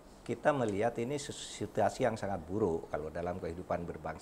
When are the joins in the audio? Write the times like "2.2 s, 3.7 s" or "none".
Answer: none